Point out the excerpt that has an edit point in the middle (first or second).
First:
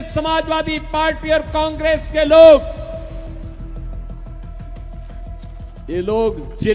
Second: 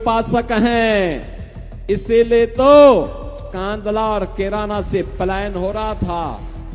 first